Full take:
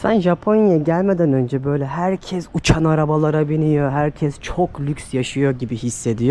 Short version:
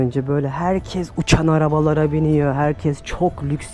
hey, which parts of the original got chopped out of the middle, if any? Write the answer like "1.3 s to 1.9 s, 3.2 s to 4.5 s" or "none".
none